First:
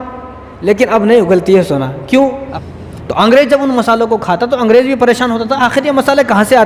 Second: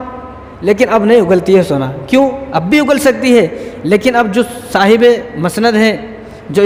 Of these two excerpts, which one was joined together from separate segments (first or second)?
first